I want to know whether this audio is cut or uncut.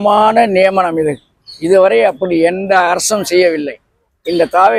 uncut